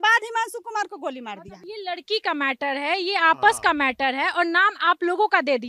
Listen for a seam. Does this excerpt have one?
yes; 1 cut; at 1.7 s

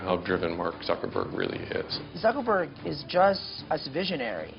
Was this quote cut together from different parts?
yes; 2 cuts; at 2.0 s, 3.5 s

